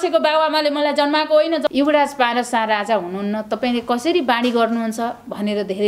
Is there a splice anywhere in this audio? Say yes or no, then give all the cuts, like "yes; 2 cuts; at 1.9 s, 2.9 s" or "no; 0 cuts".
yes; 1 cut; at 1.7 s